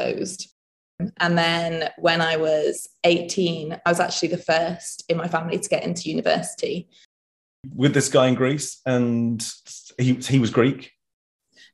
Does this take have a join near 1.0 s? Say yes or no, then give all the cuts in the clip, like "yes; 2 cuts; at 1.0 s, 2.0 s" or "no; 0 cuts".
yes; 2 cuts; at 1.0 s, 7.6 s